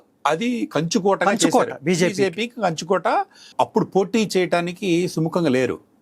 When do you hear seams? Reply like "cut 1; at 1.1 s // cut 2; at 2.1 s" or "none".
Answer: cut 1; at 3.5 s